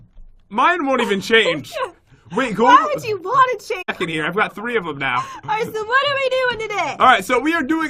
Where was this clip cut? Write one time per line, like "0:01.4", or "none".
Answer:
none